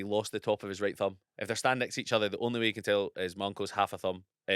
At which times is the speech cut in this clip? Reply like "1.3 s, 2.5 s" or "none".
1.3 s